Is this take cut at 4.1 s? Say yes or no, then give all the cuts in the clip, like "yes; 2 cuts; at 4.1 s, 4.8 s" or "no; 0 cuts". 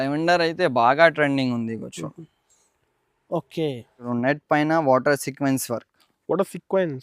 yes; 1 cut; at 4.1 s